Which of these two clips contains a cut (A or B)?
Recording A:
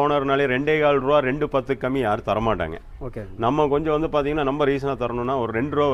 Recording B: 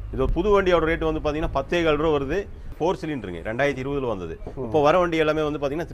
B